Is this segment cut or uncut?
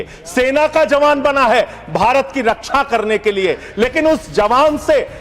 uncut